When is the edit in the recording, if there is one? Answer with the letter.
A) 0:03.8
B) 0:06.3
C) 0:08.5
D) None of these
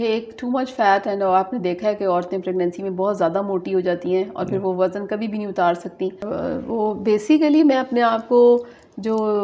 B